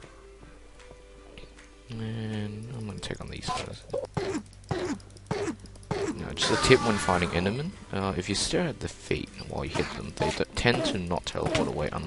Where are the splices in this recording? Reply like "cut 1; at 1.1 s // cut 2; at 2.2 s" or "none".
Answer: none